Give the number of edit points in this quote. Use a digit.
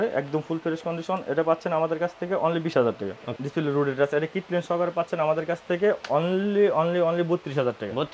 1